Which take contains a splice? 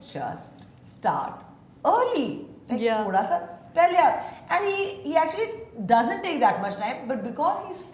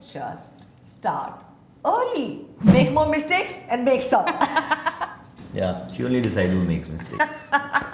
second; 1 cut; at 2.5 s

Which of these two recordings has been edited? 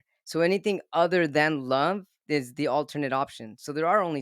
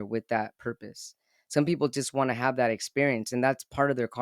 first; 1 cut; at 2.2 s

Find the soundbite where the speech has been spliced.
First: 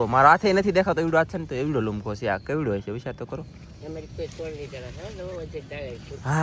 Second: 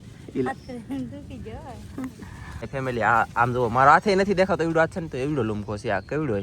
second; 1 cut; at 2.7 s

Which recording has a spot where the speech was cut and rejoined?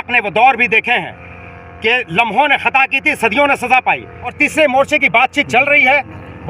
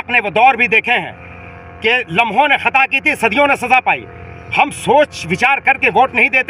first; 1 cut; at 4.4 s

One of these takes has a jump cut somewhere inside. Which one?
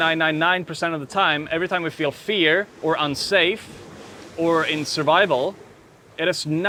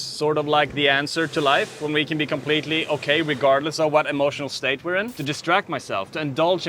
second; 1 cut; at 5.2 s

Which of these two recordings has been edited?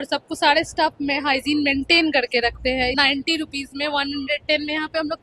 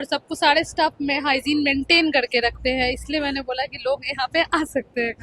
first; 1 cut; at 2.9 s

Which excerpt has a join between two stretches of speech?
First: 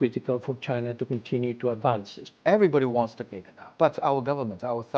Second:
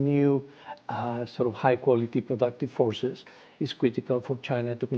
first; 2 cuts; at 2.2 s, 3.7 s

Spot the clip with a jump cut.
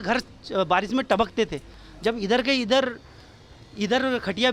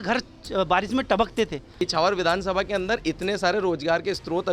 second; 1 cut; at 1.8 s

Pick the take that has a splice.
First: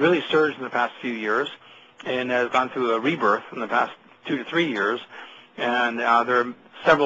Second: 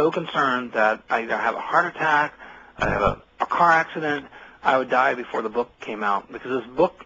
first; 1 cut; at 5.4 s

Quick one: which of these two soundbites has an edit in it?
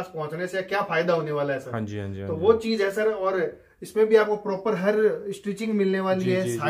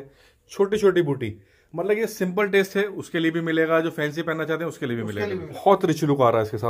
second; 1 cut; at 5.4 s

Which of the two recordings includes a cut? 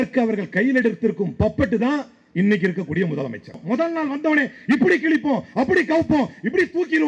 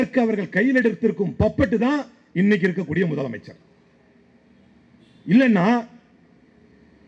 first; 1 cut; at 3.6 s

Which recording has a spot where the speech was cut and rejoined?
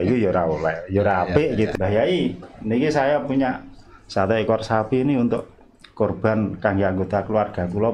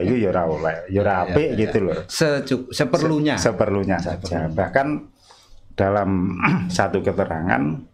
first; 1 cut; at 1.7 s

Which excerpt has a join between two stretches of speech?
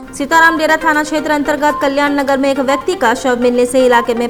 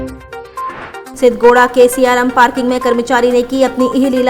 second; 1 cut; at 1.1 s

